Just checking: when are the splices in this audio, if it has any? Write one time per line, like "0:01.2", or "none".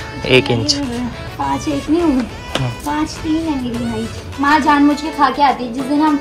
0:04.4